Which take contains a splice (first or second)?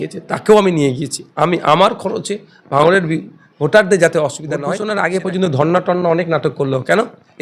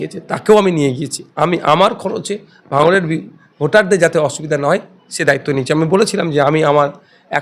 first